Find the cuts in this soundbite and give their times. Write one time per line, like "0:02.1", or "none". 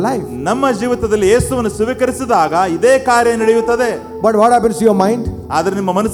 none